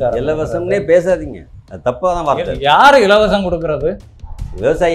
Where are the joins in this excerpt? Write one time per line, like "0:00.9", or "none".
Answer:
none